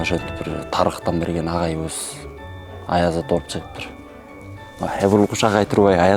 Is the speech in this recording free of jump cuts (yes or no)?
yes